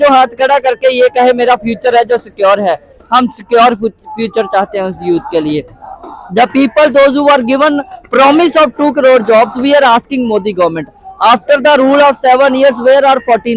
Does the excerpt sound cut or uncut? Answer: uncut